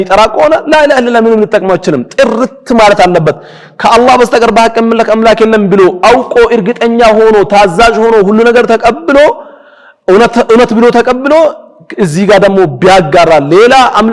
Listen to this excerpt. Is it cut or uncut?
uncut